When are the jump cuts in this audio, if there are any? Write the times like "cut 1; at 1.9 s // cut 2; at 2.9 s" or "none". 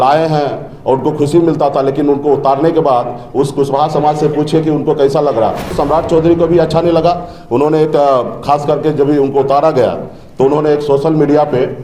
cut 1; at 5.7 s